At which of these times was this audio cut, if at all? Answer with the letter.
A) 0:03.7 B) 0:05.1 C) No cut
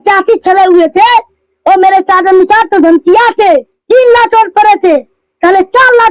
A